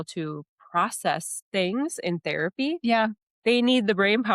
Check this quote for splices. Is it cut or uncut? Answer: cut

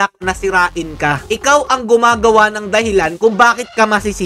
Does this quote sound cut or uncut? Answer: uncut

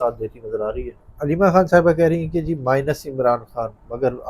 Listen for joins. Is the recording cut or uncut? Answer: cut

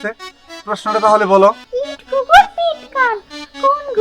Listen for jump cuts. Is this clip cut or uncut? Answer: cut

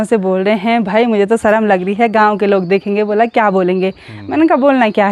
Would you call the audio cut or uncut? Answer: uncut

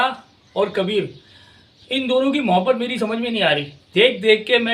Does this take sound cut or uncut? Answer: cut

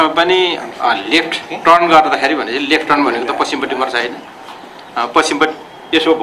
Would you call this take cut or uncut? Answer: uncut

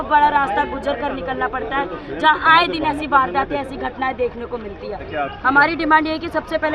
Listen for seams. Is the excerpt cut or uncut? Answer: cut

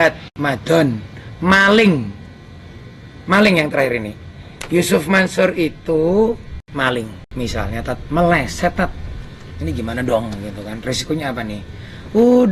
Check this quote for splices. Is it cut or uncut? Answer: cut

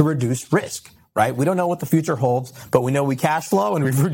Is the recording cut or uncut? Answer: uncut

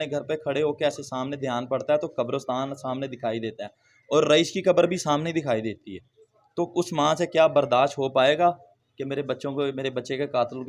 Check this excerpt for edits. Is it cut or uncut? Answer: uncut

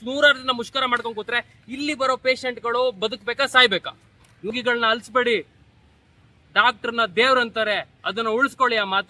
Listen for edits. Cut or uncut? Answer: cut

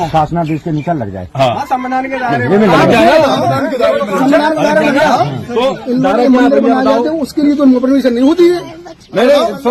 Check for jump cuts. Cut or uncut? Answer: uncut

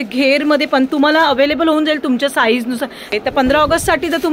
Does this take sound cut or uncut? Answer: cut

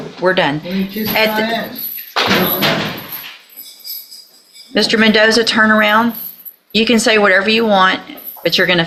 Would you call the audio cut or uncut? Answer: uncut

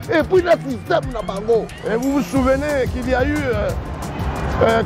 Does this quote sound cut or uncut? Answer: cut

